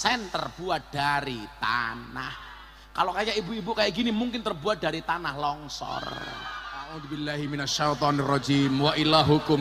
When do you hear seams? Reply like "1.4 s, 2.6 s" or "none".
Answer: 7.2 s